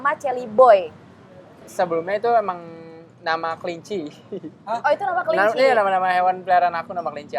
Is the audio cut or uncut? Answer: cut